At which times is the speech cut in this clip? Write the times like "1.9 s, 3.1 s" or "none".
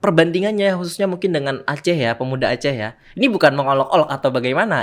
none